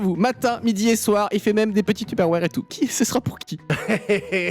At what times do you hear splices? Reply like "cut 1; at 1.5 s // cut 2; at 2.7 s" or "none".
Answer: cut 1; at 3.5 s